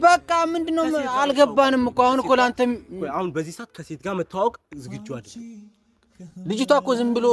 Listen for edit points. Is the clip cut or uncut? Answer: uncut